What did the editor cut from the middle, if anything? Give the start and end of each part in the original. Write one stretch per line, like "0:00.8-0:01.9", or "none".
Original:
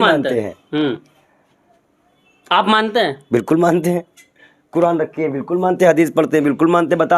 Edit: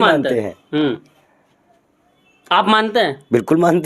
none